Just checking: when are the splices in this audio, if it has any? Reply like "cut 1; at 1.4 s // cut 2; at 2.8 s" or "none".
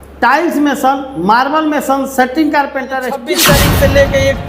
cut 1; at 3.2 s

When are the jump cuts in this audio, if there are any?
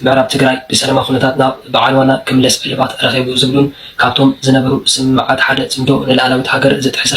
none

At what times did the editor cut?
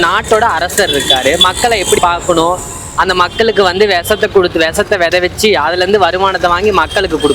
cut 1; at 2.0 s

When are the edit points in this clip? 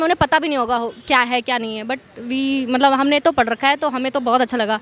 none

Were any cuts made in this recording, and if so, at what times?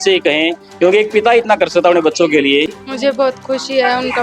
cut 1; at 2.8 s

